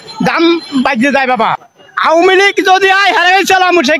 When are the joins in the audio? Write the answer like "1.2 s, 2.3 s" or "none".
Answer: 1.6 s